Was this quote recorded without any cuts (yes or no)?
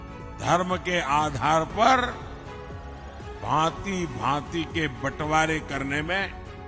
yes